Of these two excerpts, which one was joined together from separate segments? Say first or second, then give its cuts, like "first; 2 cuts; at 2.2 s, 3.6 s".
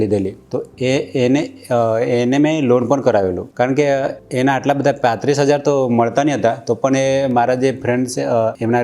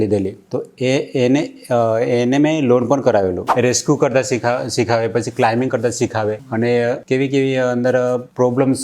second; 1 cut; at 3.5 s